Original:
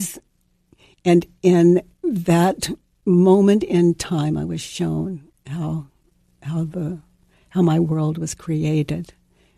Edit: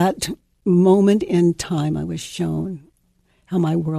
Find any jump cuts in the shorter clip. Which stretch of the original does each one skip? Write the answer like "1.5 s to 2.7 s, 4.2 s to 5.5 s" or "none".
5.4 s to 7.0 s